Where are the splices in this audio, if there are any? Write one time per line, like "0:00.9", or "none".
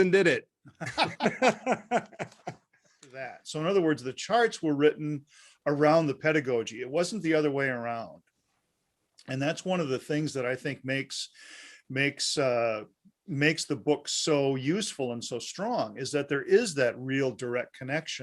0:03.4